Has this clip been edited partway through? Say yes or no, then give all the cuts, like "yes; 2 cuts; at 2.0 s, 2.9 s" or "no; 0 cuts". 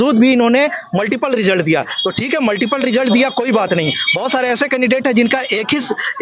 no; 0 cuts